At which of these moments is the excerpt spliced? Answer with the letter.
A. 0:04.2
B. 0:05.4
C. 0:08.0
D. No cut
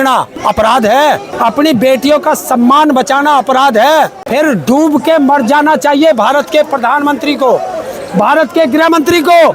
A